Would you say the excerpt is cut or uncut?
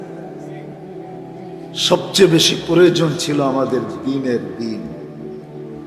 cut